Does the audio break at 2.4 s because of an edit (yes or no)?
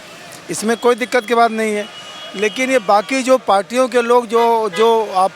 no